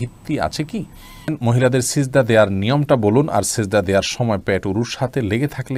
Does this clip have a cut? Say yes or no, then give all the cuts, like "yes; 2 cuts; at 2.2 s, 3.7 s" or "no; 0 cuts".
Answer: yes; 1 cut; at 1.4 s